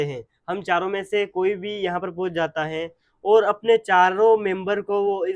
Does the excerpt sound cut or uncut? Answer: uncut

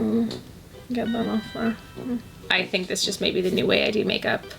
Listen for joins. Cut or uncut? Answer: cut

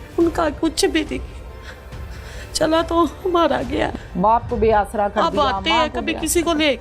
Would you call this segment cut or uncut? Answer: cut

